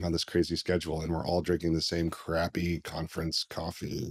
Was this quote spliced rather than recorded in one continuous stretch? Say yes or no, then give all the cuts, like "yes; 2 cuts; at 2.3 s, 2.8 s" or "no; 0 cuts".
no; 0 cuts